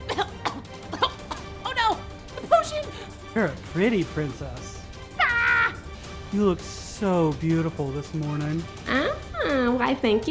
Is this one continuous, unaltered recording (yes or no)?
no